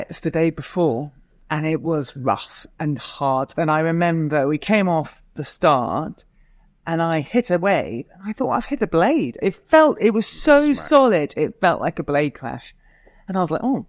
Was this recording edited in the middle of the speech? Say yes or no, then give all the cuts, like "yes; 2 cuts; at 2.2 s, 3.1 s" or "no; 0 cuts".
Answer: yes; 1 cut; at 1.4 s